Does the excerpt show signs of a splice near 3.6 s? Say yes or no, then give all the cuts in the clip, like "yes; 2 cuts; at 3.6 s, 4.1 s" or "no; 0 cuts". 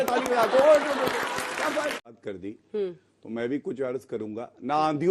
no; 1 cut; at 2.1 s